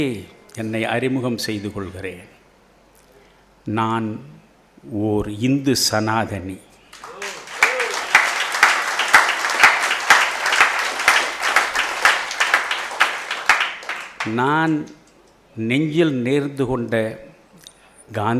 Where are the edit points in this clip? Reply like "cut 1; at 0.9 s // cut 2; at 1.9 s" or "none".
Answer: none